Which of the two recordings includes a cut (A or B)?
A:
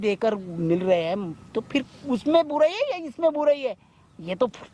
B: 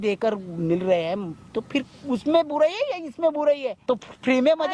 B